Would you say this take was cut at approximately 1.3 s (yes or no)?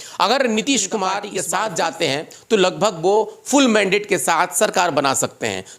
yes